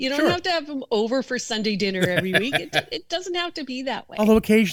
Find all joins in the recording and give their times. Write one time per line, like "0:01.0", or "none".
none

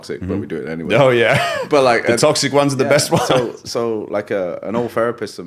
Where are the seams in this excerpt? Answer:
none

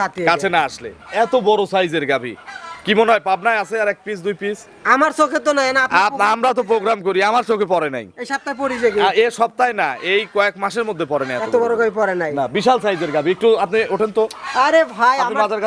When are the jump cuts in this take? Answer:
none

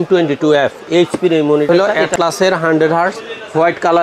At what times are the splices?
0:01.7

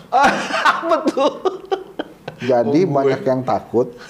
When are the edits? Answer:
none

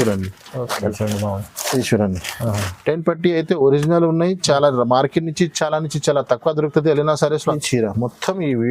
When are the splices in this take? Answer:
0:00.9
0:07.6

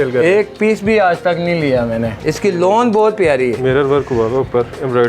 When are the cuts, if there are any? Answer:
0:02.2

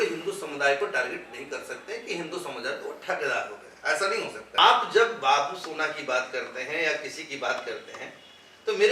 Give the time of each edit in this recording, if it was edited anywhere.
0:04.6

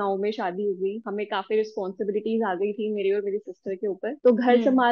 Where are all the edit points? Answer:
0:01.0

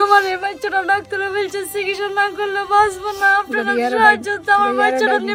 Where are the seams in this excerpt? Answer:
none

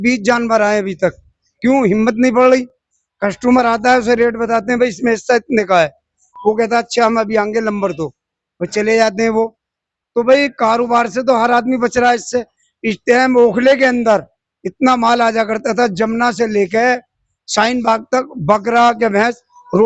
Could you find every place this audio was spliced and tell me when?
none

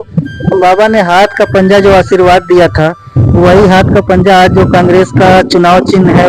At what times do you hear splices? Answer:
none

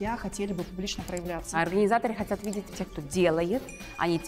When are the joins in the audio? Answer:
0:01.5
0:02.7

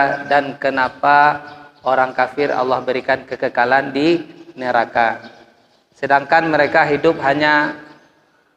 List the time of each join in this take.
none

